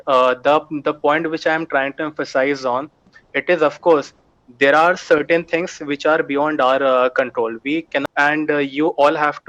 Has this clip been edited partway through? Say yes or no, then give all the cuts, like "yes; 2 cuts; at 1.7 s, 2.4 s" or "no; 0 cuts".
yes; 1 cut; at 8.0 s